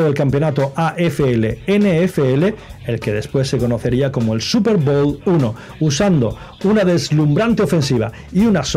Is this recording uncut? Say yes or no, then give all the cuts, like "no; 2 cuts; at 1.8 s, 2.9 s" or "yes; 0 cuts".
yes; 0 cuts